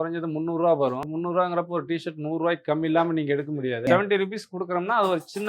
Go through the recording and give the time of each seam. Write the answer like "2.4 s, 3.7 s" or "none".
1.0 s, 3.9 s